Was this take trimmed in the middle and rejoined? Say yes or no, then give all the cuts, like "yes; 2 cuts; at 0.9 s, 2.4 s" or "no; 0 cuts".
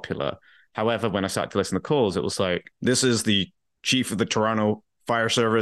yes; 1 cut; at 2.7 s